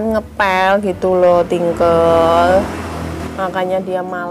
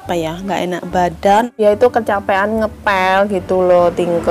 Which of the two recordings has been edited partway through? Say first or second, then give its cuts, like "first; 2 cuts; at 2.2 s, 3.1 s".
second; 1 cut; at 1.5 s